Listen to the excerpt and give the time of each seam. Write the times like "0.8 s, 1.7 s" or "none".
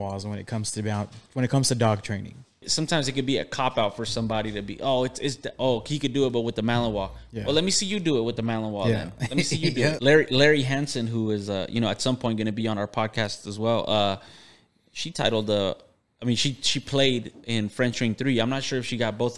2.7 s, 10.0 s